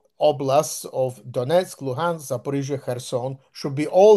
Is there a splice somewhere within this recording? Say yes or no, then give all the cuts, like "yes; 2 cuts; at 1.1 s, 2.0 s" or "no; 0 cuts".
no; 0 cuts